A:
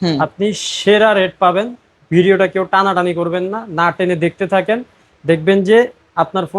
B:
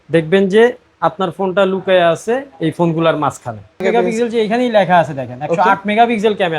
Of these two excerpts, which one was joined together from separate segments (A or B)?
B